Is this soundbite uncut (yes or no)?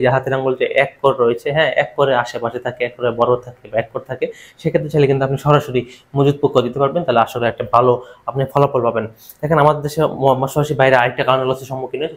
yes